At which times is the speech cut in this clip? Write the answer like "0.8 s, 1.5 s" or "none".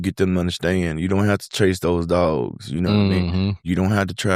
none